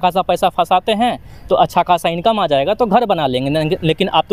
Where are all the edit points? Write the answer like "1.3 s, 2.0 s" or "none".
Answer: none